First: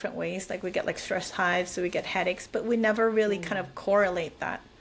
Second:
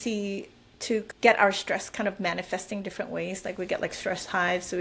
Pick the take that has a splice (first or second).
second